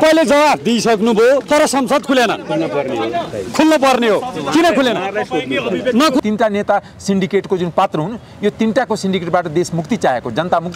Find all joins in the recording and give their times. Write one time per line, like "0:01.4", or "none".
0:06.2